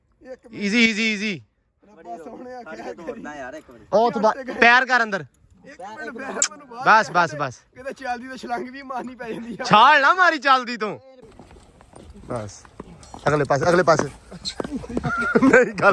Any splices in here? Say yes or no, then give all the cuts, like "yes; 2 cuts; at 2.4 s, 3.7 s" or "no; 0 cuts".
yes; 1 cut; at 11.3 s